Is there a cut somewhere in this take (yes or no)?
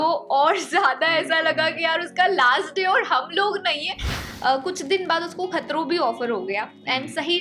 yes